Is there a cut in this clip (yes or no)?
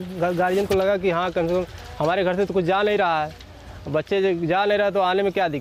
no